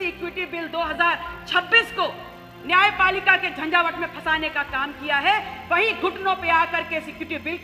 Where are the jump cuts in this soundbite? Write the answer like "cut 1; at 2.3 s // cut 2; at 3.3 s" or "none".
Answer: none